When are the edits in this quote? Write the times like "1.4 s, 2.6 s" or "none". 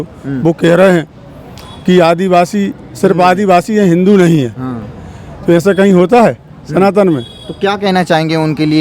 none